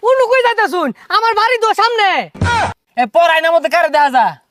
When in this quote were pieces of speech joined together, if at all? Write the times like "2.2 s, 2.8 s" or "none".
2.4 s